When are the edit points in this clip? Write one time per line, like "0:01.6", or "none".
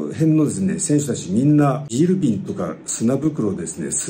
0:01.8